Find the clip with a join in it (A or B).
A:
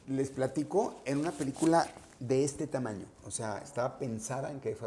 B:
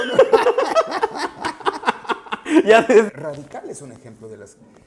B